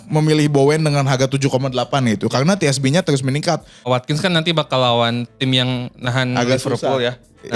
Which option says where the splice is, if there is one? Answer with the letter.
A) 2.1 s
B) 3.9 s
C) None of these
B